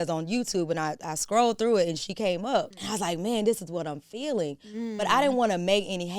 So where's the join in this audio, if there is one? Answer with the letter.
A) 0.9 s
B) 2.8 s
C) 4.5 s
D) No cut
B